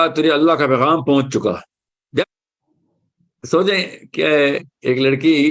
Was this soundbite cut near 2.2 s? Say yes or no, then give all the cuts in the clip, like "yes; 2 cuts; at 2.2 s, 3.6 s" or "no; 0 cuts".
yes; 1 cut; at 2.2 s